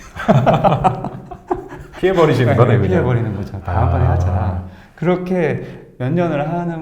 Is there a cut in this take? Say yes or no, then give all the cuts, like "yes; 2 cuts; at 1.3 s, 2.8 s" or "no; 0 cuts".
no; 0 cuts